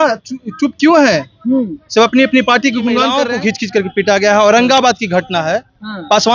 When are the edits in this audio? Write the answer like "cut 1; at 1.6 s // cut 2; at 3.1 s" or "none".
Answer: cut 1; at 3.2 s